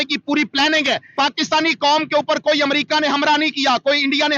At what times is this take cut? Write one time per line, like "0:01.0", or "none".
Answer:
0:01.1